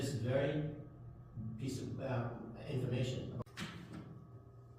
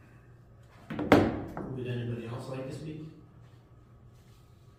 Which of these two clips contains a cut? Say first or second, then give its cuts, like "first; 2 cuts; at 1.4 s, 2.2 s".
first; 1 cut; at 3.4 s